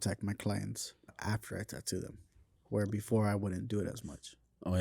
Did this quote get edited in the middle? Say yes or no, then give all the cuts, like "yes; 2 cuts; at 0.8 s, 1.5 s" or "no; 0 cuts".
yes; 1 cut; at 1.2 s